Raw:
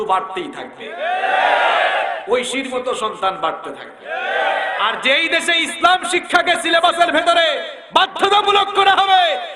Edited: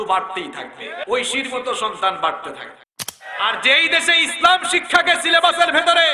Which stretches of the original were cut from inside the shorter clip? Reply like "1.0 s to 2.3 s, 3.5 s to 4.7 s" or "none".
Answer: 1.0 s to 2.2 s, 4.4 s to 4.6 s